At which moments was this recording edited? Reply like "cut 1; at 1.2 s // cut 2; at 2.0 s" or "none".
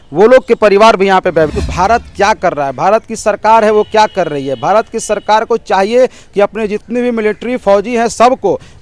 cut 1; at 1.5 s